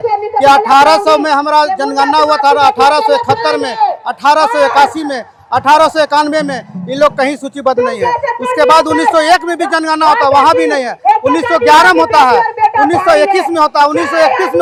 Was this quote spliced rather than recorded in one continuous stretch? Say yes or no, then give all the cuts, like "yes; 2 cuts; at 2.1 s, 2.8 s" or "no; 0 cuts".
no; 0 cuts